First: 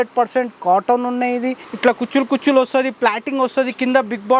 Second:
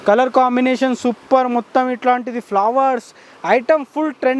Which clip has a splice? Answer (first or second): first